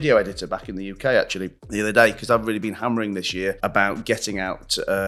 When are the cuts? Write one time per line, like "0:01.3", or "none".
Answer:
none